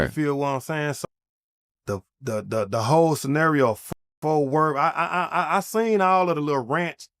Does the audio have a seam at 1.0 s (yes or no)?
yes